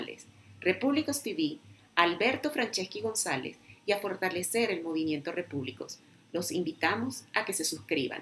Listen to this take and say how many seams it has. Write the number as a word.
zero